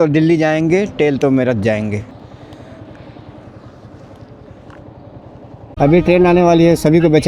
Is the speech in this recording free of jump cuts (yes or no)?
no